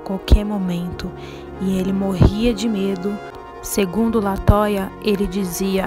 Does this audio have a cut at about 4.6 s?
no; 1 cut; at 3.3 s

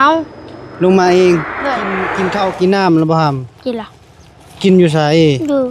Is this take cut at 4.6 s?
no; 1 cut; at 2.1 s

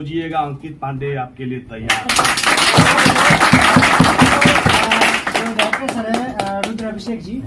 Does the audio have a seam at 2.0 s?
no; 0 cuts

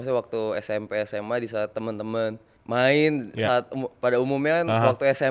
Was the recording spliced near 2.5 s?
yes; 1 cut; at 2.5 s

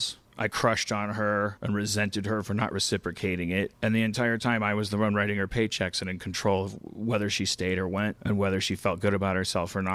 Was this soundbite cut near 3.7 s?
no; 0 cuts

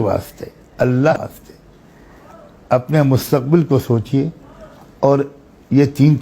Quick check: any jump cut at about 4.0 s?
no; 1 cut; at 1.1 s

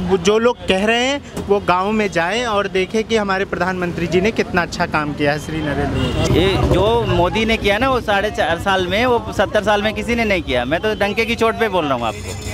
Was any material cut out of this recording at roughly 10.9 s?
no; 1 cut; at 6.3 s

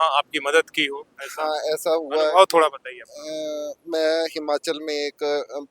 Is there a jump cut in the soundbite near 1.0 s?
no; 0 cuts

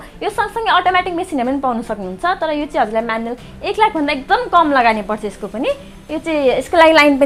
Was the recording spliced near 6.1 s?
no; 0 cuts

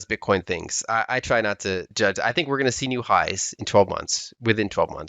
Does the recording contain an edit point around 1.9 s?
yes; 1 cut; at 1.9 s

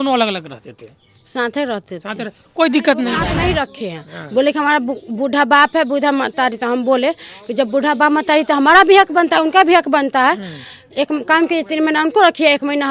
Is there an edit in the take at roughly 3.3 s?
yes; 1 cut; at 3.3 s

